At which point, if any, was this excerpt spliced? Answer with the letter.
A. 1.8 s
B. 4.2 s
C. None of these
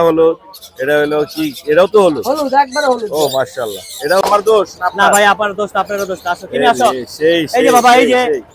B